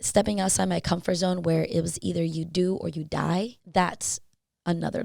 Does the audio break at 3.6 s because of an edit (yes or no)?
yes